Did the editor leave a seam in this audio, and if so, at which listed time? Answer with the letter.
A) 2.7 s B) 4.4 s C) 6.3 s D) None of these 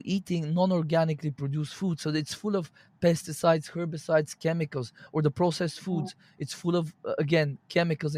D